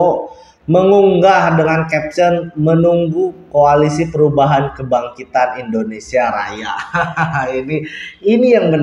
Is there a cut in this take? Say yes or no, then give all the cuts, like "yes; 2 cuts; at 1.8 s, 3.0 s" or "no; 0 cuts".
no; 0 cuts